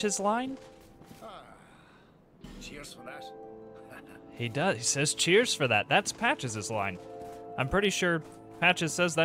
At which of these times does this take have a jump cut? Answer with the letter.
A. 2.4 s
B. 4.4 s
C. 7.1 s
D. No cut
A